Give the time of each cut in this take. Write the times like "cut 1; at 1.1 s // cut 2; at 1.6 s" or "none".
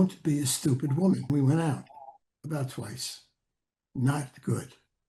cut 1; at 1.3 s